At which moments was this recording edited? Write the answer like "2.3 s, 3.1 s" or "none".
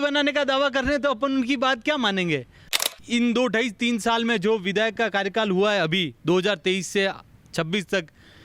2.6 s

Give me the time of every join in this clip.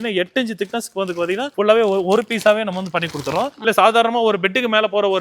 3.6 s

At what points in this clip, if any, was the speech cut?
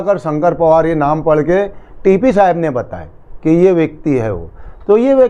none

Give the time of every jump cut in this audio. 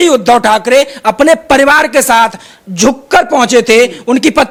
none

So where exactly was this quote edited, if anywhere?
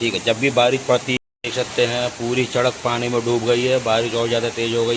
1.2 s

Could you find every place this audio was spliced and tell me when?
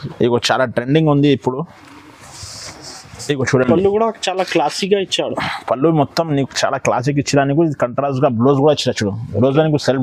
none

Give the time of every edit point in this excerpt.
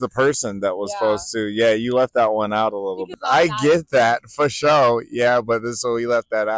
3.1 s

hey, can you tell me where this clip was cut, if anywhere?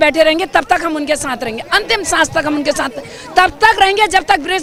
none

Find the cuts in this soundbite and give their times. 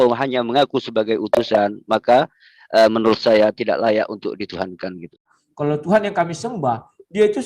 5.3 s

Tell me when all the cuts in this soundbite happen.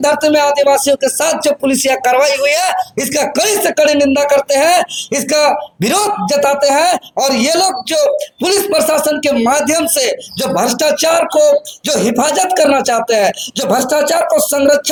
none

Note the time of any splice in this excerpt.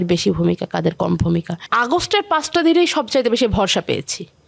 1.6 s

